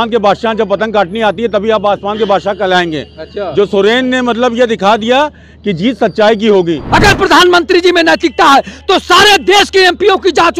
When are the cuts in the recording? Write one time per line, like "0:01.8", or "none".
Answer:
0:06.8